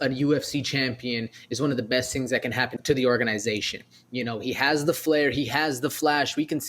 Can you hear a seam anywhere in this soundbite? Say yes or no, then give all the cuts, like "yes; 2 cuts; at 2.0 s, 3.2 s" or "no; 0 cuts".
yes; 1 cut; at 2.8 s